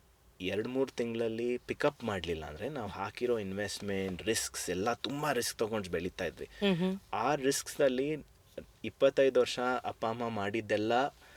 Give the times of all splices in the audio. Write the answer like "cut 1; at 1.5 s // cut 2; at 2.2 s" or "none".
none